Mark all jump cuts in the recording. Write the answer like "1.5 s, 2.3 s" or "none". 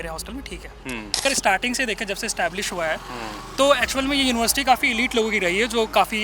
1.2 s